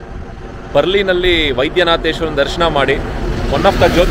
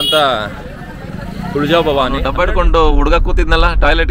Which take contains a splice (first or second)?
second